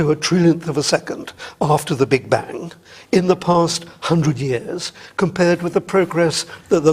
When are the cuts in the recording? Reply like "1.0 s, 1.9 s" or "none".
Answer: 4.2 s